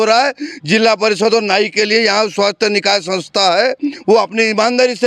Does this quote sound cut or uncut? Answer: uncut